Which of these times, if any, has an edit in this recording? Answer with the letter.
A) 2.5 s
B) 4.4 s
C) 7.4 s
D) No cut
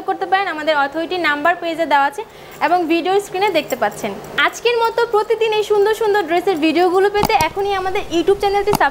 B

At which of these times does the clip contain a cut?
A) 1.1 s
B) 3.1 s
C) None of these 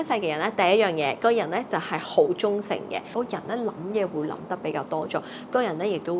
B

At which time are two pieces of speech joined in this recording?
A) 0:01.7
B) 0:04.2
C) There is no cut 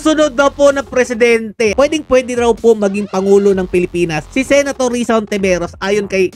A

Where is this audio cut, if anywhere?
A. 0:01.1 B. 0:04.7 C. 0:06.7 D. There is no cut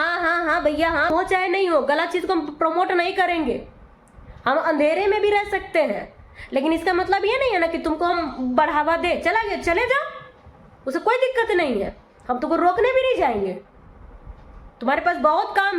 A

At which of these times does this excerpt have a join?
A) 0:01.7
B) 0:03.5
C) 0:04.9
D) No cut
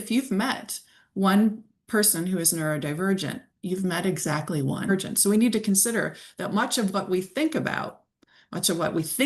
C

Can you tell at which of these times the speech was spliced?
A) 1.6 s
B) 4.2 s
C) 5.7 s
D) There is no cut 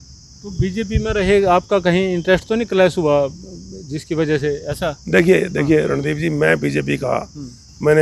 D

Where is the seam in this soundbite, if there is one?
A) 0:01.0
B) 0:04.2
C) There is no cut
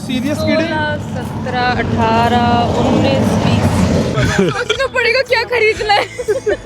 B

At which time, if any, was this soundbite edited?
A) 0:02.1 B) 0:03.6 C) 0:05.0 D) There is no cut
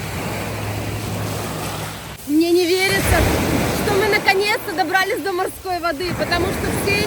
A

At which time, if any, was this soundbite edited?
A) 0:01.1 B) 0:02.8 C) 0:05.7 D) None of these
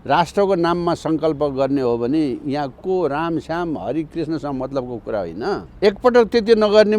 C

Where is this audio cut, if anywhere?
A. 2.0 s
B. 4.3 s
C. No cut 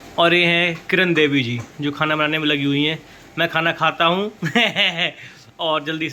C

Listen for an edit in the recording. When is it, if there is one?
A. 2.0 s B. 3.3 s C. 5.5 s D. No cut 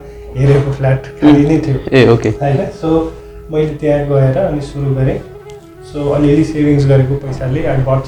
D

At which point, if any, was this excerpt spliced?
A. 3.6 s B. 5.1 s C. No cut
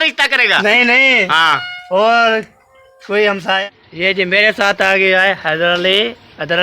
A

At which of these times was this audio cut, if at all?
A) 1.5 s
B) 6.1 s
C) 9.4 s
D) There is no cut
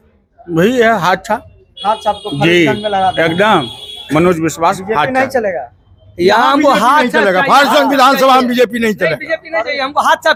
D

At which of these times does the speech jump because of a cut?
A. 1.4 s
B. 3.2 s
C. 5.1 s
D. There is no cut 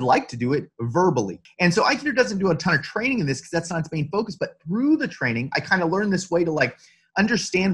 A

